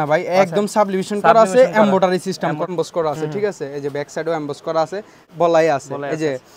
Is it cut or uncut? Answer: cut